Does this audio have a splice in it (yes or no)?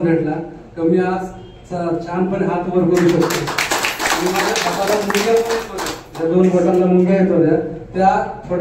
no